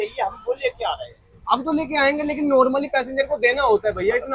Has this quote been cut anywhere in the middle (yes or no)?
no